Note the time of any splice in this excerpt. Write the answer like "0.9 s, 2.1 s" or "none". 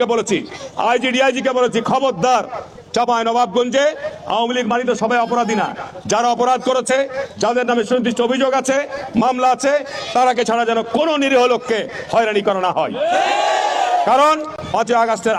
none